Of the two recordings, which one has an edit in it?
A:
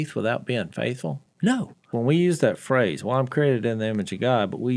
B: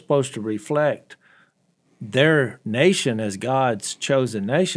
A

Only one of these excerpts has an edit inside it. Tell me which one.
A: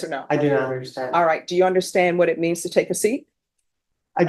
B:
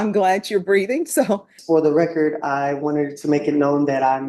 B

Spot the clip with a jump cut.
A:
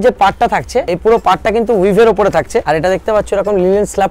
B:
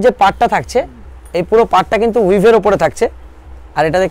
A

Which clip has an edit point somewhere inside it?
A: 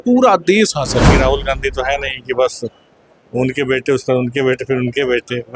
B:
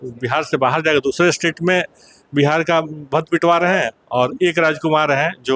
A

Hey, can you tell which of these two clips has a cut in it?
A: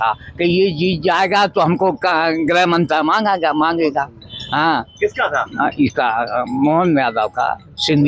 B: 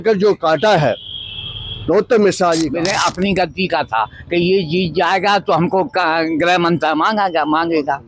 B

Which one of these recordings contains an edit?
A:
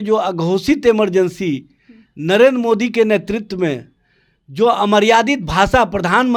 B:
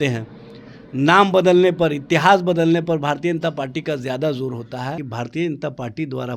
B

